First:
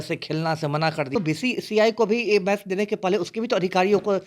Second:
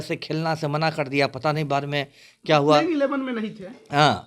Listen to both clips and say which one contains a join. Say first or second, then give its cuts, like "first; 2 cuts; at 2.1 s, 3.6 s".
first; 1 cut; at 1.1 s